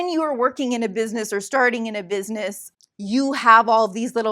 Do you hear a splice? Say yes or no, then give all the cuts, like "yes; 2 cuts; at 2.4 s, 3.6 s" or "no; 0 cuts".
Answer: yes; 1 cut; at 2.6 s